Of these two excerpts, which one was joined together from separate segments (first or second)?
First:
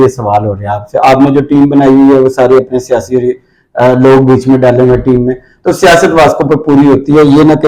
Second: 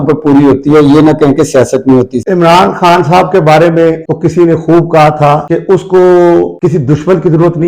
second